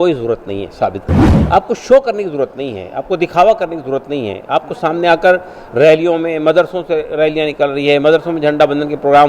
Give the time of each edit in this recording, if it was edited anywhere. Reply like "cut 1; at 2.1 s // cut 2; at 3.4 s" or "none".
cut 1; at 1.2 s